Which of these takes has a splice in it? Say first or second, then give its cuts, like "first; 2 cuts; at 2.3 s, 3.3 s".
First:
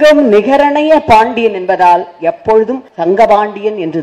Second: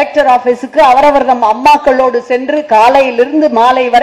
first; 1 cut; at 2.9 s